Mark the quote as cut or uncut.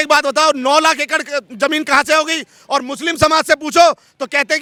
uncut